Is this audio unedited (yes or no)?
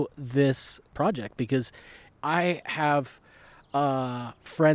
no